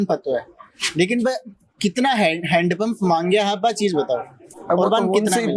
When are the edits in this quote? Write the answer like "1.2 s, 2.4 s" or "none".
none